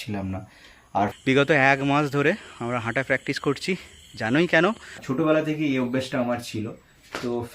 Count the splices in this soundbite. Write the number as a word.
two